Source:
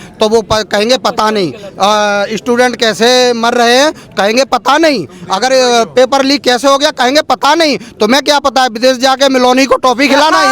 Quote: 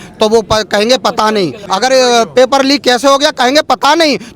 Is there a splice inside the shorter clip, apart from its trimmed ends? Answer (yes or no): yes